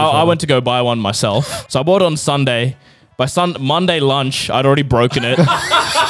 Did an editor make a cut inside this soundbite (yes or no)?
yes